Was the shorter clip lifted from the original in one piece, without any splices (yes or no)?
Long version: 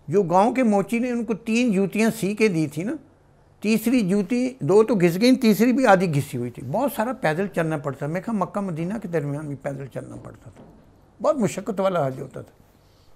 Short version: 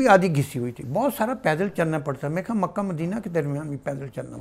yes